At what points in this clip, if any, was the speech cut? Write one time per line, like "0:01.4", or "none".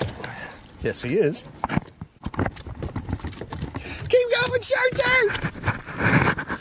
0:02.2